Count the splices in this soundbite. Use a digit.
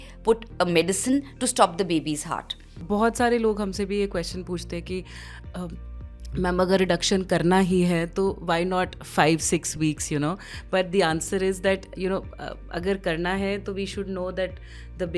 1